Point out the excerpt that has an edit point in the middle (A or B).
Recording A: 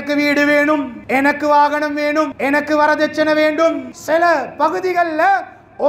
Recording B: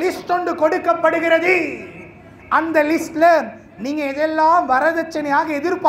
A